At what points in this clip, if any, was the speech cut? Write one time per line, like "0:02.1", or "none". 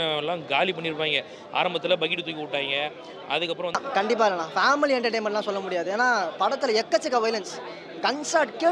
0:03.7